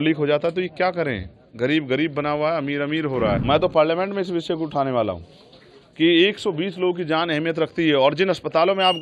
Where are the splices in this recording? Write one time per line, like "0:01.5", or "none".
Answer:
0:03.4